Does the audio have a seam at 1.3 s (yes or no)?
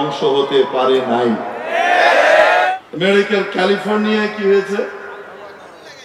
no